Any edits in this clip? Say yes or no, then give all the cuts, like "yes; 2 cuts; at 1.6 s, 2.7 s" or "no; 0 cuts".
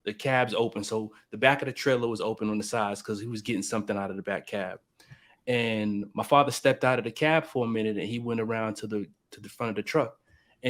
no; 0 cuts